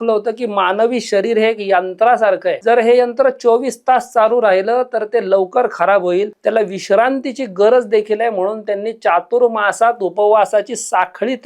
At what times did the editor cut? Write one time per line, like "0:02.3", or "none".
0:02.5
0:06.3